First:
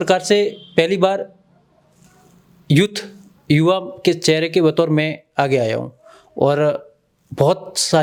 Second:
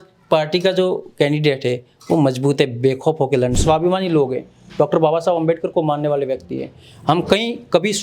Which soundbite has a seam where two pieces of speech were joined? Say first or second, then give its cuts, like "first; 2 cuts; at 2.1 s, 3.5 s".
second; 1 cut; at 3.6 s